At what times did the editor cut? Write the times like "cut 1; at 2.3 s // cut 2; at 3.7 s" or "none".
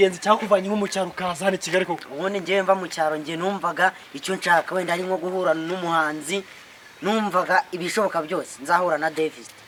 none